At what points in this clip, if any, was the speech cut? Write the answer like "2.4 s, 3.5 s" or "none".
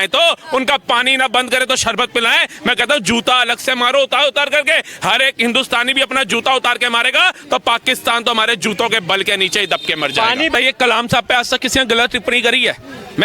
10.5 s